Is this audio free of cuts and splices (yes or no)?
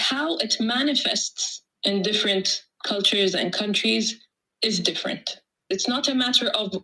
no